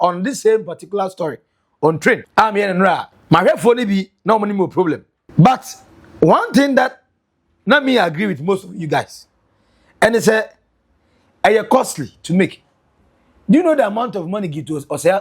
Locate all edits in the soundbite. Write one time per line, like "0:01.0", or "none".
0:02.3
0:03.1
0:05.1